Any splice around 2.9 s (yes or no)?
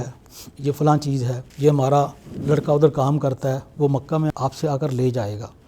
no